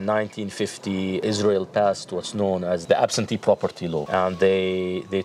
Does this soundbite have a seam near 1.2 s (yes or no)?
yes